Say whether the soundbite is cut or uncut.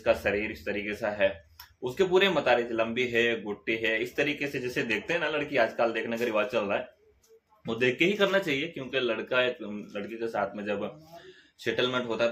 uncut